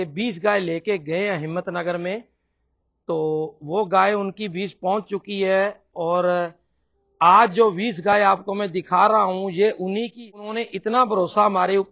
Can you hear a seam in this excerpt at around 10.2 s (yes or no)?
yes